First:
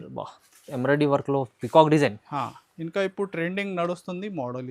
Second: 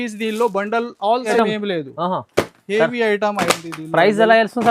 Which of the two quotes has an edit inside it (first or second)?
second